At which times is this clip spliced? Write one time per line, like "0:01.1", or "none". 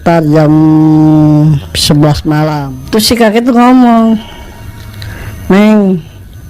0:02.7